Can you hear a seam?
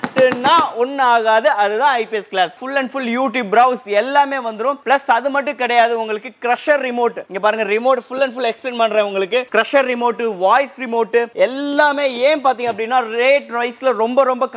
no; 0 cuts

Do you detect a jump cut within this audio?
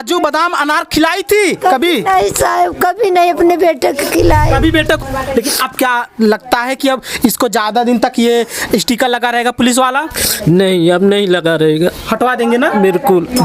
yes; 1 cut; at 5.0 s

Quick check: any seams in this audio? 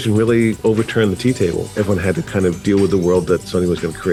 no; 0 cuts

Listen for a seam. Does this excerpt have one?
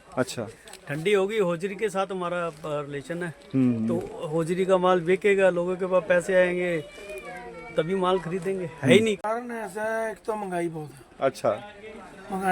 yes; 1 cut; at 9.2 s

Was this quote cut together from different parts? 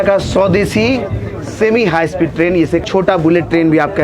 yes; 1 cut; at 2.8 s

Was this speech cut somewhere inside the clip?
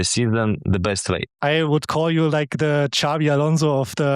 yes; 1 cut; at 1.4 s

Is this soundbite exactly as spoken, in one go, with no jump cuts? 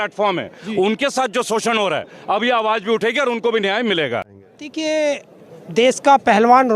no; 1 cut; at 4.3 s

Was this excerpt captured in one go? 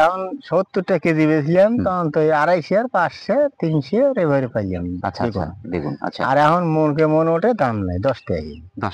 yes; 0 cuts

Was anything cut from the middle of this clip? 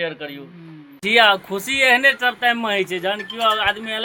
yes; 1 cut; at 1.0 s

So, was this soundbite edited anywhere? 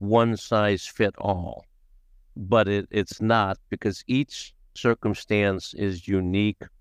no; 0 cuts

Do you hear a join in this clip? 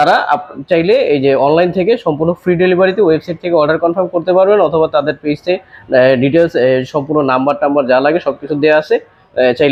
no; 0 cuts

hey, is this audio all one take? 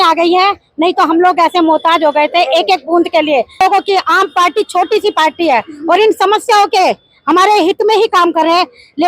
no; 1 cut; at 3.6 s

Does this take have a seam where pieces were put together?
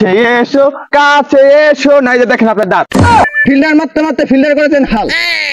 yes; 1 cut; at 3.2 s

